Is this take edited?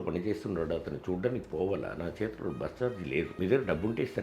yes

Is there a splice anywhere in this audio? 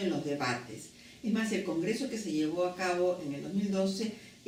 no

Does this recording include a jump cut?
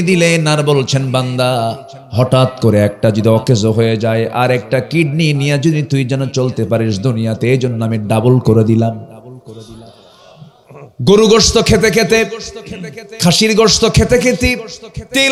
no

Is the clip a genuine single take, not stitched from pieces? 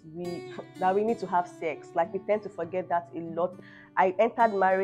no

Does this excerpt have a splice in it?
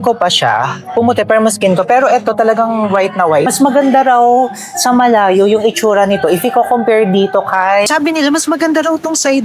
yes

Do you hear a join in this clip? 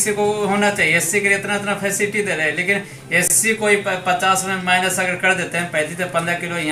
no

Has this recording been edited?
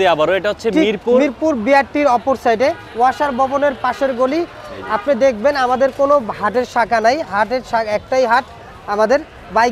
no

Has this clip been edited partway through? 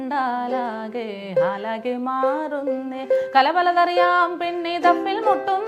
no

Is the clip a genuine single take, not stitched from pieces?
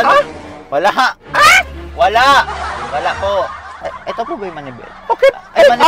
no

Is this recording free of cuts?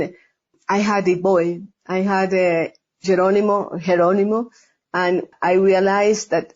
no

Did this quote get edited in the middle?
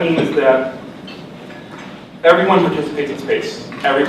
yes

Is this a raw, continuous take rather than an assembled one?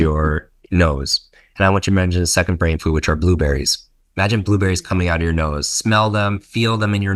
yes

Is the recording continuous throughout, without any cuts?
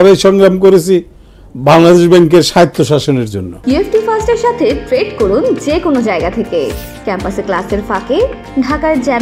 no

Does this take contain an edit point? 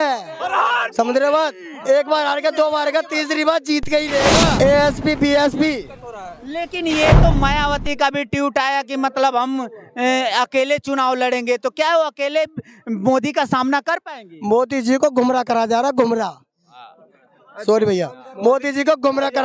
yes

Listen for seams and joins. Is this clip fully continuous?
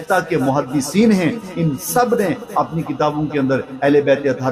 yes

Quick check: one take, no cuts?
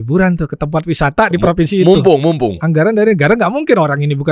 no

